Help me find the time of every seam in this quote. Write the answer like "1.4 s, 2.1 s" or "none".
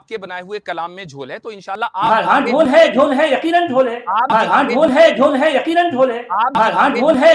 1.9 s, 4.3 s, 6.5 s

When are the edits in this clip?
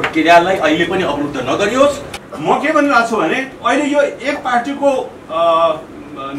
2.1 s

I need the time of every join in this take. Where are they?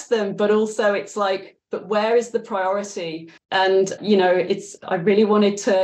3.7 s, 4.7 s

